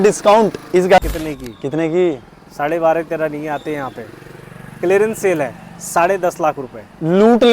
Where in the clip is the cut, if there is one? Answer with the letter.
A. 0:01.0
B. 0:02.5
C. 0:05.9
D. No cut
A